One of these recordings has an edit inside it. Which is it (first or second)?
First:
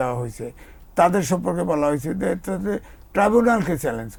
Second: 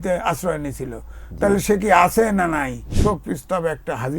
second